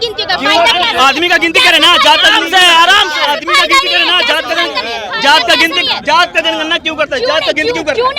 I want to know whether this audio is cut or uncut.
uncut